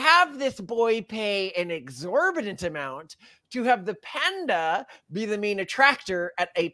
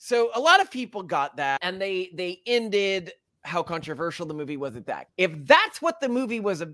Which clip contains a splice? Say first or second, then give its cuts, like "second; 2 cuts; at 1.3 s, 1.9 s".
second; 2 cuts; at 1.6 s, 5.0 s